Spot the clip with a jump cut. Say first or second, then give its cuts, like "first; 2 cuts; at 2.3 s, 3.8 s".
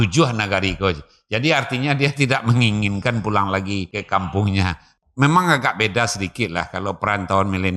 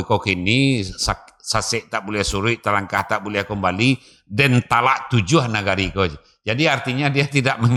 first; 2 cuts; at 3.9 s, 4.8 s